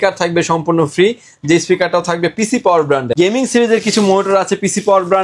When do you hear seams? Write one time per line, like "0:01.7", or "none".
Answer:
0:03.1